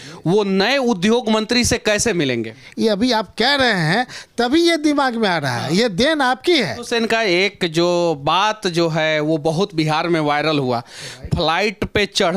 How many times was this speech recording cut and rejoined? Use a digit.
2